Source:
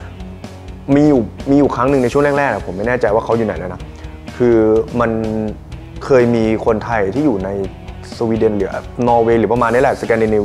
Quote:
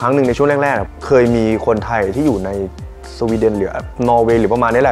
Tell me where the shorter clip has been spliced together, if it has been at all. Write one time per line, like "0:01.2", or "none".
0:00.9